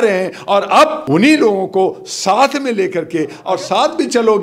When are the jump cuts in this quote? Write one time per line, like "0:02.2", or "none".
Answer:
0:01.0
0:03.4